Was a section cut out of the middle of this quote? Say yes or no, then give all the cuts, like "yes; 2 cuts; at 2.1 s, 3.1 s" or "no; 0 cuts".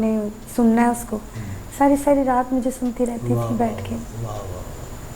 no; 0 cuts